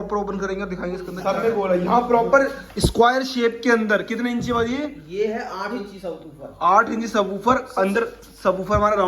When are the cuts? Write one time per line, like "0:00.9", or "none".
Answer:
0:01.1